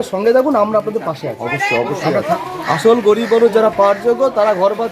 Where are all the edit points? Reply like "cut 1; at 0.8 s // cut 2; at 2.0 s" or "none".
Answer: cut 1; at 2.3 s